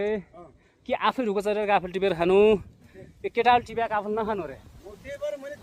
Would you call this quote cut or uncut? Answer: uncut